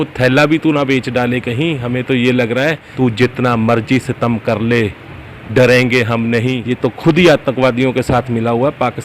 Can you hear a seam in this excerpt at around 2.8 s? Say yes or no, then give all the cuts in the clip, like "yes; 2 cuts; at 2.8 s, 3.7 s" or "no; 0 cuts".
yes; 2 cuts; at 2.8 s, 6.6 s